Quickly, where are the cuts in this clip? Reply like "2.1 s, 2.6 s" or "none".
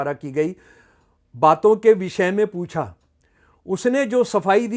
none